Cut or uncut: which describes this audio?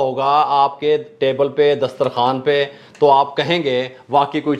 uncut